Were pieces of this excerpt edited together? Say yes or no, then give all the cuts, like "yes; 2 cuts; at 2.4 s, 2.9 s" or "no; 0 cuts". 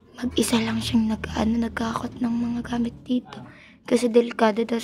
no; 0 cuts